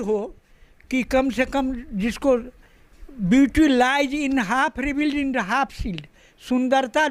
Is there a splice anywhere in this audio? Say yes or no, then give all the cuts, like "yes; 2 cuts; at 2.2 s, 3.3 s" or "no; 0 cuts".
no; 0 cuts